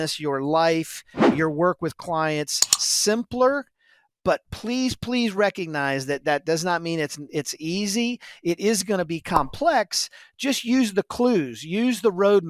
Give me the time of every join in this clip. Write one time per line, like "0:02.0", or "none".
none

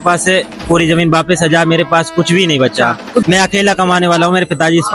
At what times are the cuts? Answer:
0:03.2

